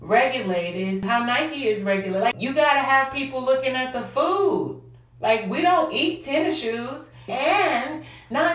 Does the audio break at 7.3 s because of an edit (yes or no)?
yes